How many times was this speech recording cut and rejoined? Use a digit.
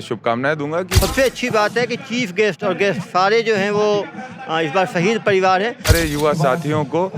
2